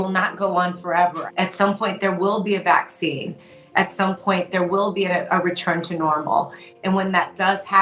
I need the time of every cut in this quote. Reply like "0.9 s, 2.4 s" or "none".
1.2 s